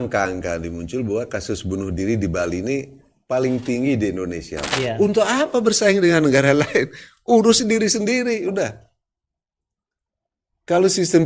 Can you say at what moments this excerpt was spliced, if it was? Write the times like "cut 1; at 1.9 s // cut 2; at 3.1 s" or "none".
cut 1; at 4.7 s